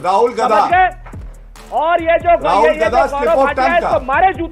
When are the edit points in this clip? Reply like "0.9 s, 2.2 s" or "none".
none